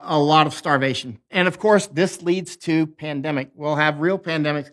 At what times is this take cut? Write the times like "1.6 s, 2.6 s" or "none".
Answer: 1.3 s

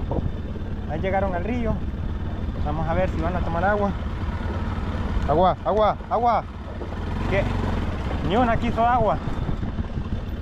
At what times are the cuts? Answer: none

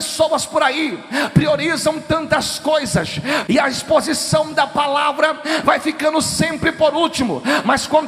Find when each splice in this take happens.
3.4 s

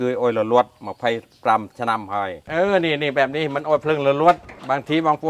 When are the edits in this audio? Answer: 2.5 s

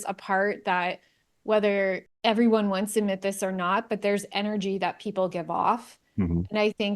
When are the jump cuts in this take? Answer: 2.1 s

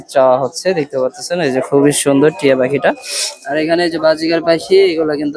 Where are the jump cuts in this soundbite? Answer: none

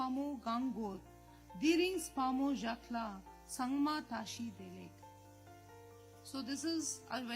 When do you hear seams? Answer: 4.9 s, 6.3 s

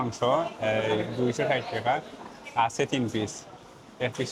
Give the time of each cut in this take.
none

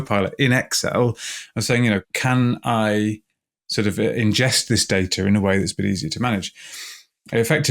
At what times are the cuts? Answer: 2.1 s

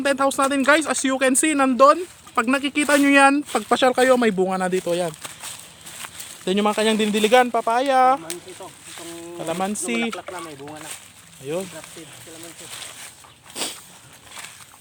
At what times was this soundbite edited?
none

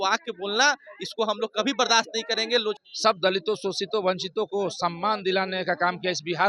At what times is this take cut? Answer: 2.8 s

